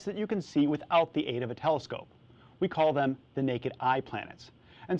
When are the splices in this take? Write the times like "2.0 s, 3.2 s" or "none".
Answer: 1.4 s